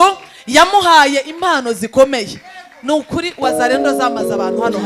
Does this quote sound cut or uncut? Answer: uncut